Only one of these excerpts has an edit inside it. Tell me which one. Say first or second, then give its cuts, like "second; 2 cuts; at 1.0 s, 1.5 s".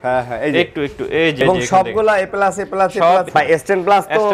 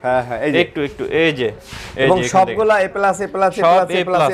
first; 2 cuts; at 1.4 s, 3.3 s